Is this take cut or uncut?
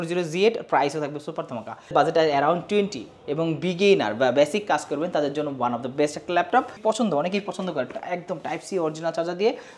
cut